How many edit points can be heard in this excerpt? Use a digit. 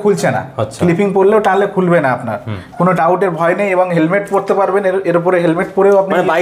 0